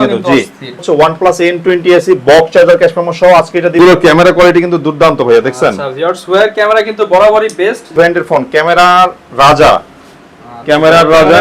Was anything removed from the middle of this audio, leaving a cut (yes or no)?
yes